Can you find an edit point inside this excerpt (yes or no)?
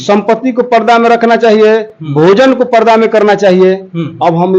no